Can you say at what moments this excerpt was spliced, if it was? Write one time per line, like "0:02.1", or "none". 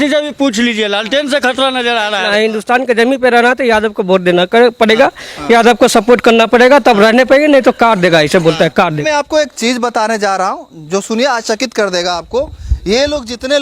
0:02.3
0:09.0